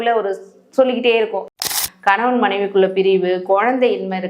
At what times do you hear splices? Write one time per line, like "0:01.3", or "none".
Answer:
0:01.6